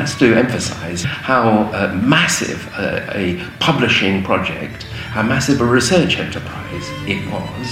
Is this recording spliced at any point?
no; 0 cuts

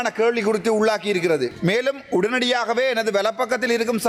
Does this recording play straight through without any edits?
no; 1 cut; at 1.5 s

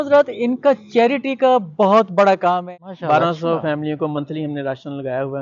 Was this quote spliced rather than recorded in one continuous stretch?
yes; 1 cut; at 2.6 s

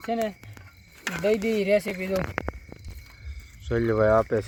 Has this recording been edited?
no; 0 cuts

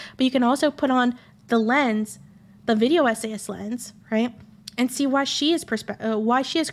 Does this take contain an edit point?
no; 0 cuts

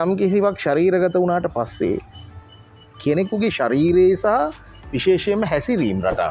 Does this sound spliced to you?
no; 0 cuts

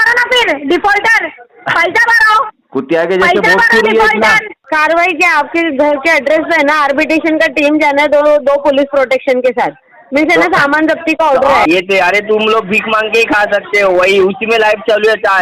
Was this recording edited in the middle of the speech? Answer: yes; 2 cuts; at 4.5 s, 11.7 s

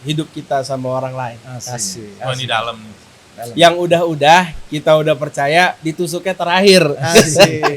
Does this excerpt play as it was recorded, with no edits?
yes; 0 cuts

